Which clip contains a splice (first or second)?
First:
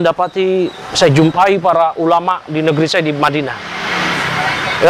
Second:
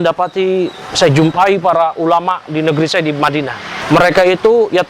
second